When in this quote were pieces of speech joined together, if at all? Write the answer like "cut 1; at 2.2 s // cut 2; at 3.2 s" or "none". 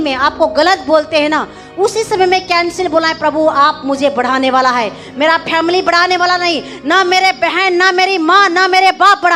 none